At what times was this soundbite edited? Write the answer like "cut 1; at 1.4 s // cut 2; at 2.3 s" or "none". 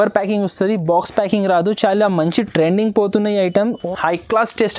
cut 1; at 3.8 s